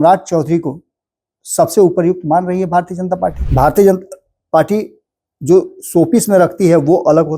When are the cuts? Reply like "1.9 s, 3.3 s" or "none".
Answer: 3.4 s